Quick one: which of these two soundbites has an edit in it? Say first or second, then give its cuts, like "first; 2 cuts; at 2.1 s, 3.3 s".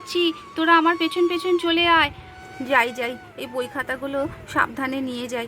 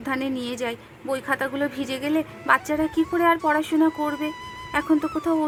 first; 1 cut; at 2.3 s